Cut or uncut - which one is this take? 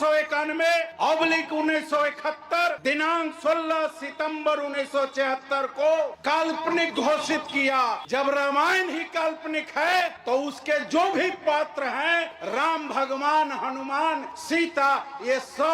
cut